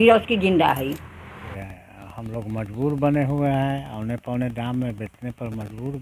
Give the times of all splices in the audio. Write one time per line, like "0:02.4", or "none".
0:01.6